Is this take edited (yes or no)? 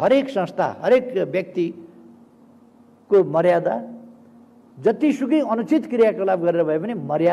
no